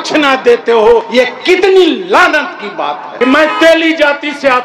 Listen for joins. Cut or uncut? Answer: cut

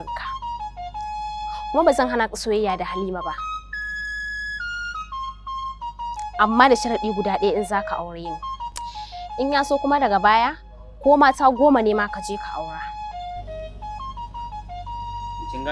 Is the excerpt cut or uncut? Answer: uncut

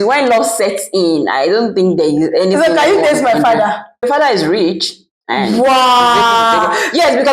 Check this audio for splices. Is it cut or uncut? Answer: cut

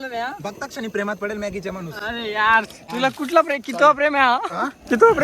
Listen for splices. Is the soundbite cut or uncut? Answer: cut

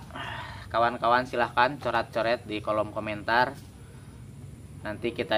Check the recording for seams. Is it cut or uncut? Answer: uncut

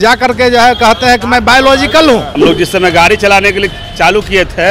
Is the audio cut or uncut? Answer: cut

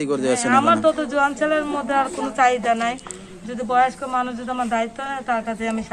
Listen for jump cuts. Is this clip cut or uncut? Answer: uncut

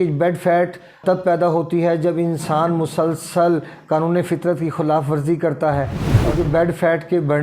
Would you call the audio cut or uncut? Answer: cut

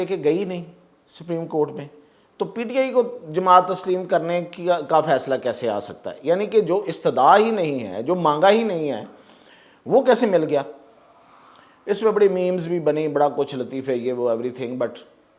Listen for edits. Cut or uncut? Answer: uncut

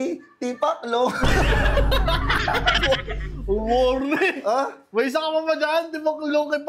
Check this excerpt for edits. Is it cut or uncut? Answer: uncut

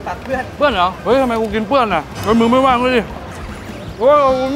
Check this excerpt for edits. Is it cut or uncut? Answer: cut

